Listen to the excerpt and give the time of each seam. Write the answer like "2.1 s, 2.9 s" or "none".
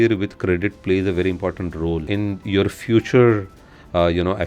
2.0 s